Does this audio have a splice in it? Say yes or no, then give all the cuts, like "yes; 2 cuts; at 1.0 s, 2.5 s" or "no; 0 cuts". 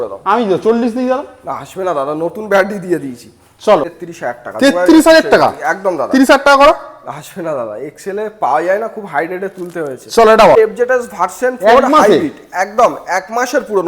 yes; 2 cuts; at 4.0 s, 10.6 s